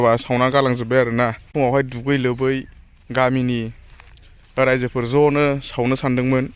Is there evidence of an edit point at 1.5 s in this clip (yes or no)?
yes